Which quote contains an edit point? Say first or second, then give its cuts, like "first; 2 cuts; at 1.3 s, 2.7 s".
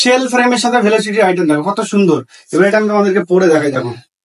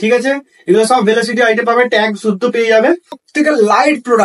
second; 1 cut; at 3.2 s